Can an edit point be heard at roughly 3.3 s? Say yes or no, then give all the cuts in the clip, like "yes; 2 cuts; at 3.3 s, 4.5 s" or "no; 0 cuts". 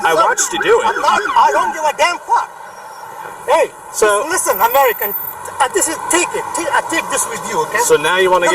yes; 1 cut; at 3.3 s